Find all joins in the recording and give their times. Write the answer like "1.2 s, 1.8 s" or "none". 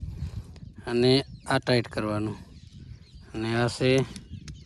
none